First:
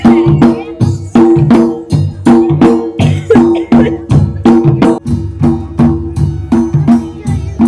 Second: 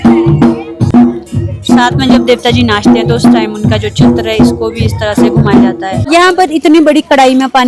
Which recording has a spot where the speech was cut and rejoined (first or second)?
second